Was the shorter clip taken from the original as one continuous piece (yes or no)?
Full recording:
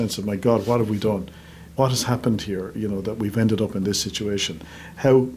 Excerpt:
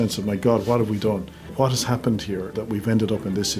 no